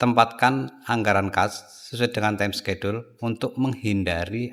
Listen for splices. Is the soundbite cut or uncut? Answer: uncut